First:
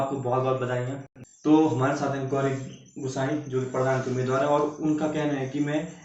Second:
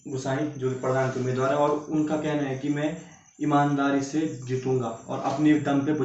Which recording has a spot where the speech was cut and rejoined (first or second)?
first